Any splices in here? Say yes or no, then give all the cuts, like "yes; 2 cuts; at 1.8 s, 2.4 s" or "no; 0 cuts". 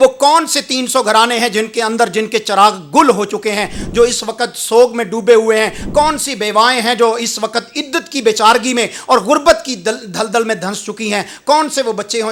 no; 0 cuts